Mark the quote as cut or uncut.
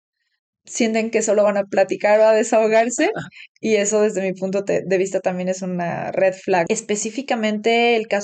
cut